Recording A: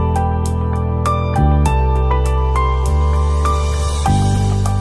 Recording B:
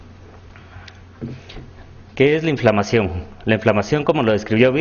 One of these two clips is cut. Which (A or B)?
B